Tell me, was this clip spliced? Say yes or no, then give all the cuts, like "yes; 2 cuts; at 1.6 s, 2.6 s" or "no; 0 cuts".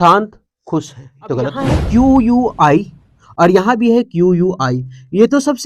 yes; 1 cut; at 1.6 s